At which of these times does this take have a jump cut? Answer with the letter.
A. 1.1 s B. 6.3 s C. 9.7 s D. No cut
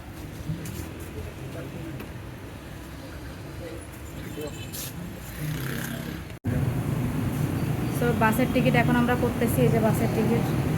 B